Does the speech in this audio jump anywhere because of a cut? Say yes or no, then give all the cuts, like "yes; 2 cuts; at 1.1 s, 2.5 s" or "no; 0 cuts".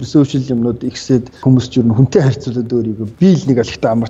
yes; 2 cuts; at 1.4 s, 3.0 s